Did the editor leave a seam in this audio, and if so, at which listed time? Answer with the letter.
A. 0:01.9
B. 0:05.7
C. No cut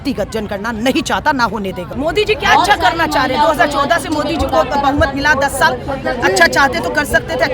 A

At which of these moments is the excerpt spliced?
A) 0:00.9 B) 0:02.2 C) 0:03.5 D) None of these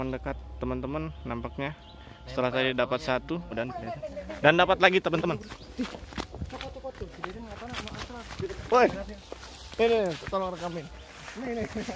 C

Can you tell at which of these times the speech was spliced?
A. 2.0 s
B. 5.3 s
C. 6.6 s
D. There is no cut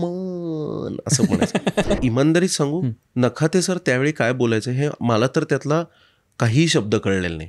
A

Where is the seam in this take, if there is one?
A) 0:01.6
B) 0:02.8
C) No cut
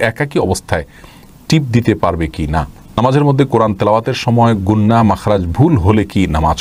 B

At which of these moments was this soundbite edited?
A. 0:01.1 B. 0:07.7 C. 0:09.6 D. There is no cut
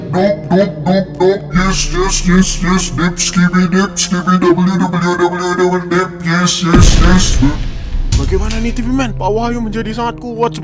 D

